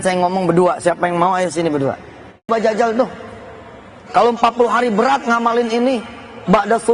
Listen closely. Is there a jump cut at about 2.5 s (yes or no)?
yes